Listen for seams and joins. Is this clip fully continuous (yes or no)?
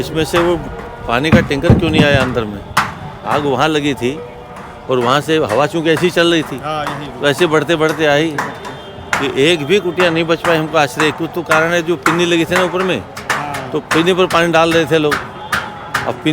yes